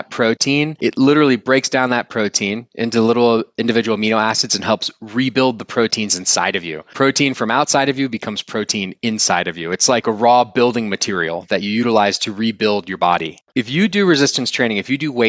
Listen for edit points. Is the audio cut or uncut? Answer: cut